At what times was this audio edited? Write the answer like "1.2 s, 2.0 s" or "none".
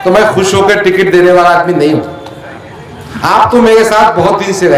none